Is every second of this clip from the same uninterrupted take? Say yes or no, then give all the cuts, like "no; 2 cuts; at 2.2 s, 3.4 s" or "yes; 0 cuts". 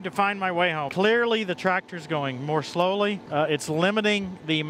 no; 2 cuts; at 0.9 s, 3.2 s